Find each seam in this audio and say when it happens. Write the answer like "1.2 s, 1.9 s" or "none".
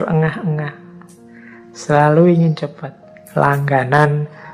none